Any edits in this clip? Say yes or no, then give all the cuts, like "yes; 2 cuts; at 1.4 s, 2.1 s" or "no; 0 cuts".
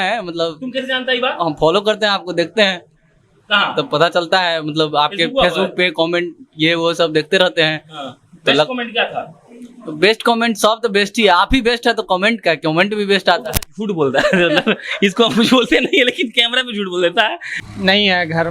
yes; 1 cut; at 17.5 s